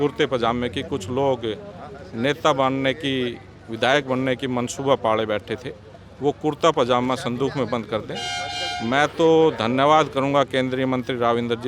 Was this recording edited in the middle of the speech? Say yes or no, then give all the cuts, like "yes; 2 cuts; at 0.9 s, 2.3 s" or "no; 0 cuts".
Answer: no; 0 cuts